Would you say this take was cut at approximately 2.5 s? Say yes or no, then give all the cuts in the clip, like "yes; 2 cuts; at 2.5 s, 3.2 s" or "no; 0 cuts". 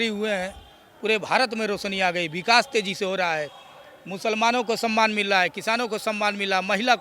no; 0 cuts